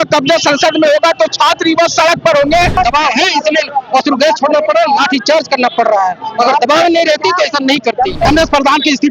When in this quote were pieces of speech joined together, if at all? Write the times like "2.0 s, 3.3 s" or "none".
2.7 s, 8.2 s

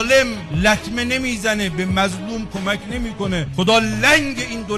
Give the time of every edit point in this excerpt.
none

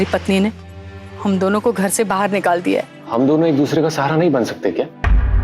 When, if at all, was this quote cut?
3.0 s

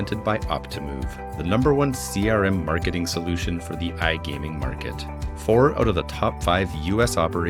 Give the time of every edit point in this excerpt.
none

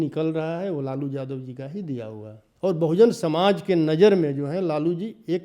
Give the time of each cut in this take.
2.4 s

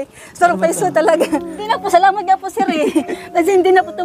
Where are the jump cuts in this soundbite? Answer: 1.7 s

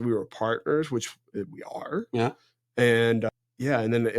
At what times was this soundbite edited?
3.3 s

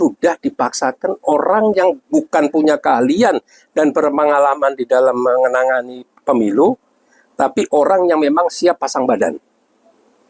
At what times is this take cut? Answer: none

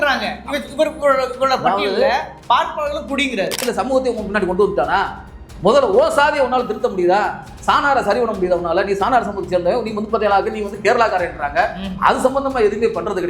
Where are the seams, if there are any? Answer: 3.6 s

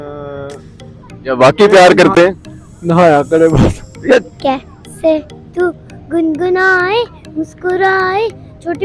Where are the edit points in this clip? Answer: 4.3 s

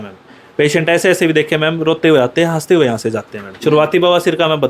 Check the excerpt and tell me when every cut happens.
3.4 s

